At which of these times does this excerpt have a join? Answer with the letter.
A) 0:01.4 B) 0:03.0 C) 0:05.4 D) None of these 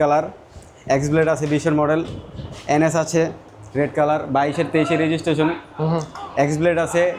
D